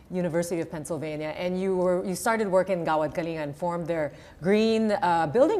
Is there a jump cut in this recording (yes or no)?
yes